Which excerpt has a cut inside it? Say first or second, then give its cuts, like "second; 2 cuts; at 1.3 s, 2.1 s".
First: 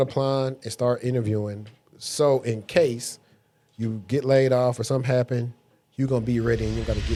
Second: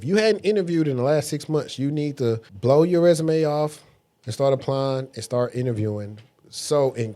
second; 1 cut; at 2.5 s